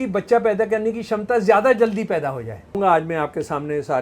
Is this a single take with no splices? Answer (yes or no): no